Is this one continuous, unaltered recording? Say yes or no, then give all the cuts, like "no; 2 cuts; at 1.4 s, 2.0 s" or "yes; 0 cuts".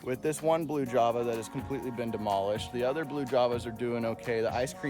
yes; 0 cuts